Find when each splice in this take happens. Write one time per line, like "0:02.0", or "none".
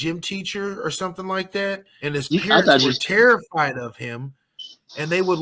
0:01.9